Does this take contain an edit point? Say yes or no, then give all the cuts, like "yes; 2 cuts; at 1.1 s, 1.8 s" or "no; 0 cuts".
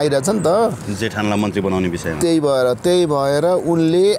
no; 0 cuts